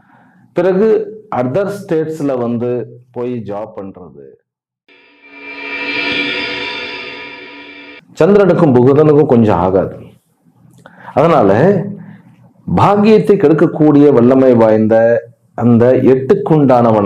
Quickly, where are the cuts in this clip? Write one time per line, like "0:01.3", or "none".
0:05.0
0:08.0